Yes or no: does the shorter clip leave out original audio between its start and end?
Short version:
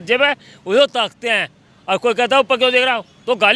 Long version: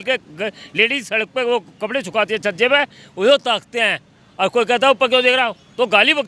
no